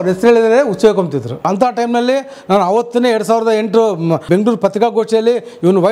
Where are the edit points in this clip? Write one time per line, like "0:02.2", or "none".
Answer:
0:01.5
0:04.2